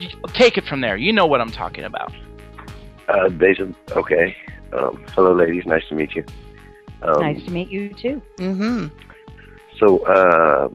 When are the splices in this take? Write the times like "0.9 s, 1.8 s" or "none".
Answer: 4.1 s